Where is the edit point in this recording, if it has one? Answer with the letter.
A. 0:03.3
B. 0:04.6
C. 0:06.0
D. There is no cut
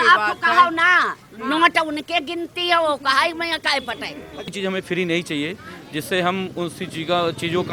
B